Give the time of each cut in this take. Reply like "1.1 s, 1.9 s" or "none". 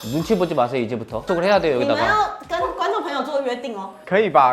1.2 s